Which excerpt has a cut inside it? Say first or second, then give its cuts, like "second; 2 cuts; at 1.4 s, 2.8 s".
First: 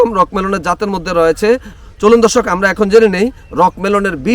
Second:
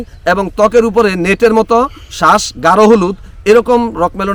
first; 1 cut; at 1.7 s